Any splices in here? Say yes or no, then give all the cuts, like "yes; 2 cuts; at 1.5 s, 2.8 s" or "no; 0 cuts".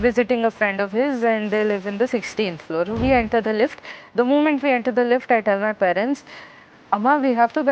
no; 0 cuts